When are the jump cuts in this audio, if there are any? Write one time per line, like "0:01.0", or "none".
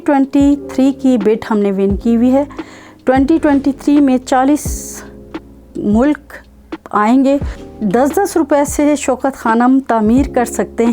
0:07.6